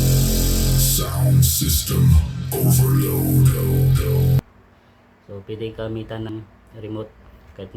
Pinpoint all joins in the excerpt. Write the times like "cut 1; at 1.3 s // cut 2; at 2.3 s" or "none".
cut 1; at 4.4 s // cut 2; at 6.3 s